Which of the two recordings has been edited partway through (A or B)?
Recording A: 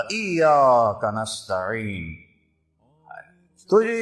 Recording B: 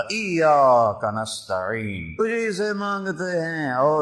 B